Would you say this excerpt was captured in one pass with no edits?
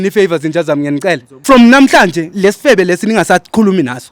no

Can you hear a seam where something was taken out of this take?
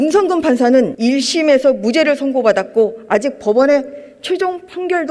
yes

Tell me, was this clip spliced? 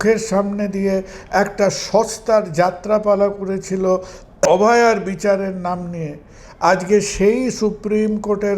yes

